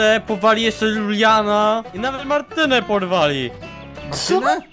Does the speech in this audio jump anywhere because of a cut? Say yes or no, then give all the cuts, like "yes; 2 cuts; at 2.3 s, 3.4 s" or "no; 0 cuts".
no; 0 cuts